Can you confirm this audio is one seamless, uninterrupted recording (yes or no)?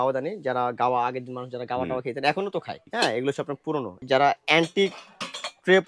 no